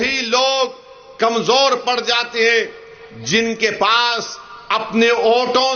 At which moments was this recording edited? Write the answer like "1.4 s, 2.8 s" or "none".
none